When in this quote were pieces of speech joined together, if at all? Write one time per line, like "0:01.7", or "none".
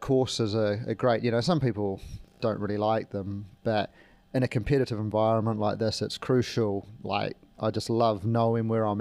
none